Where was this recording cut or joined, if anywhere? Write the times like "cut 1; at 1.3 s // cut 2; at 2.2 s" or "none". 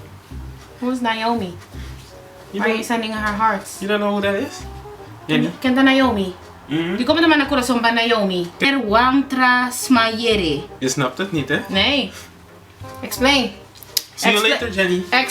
cut 1; at 4.6 s // cut 2; at 8.6 s // cut 3; at 10.7 s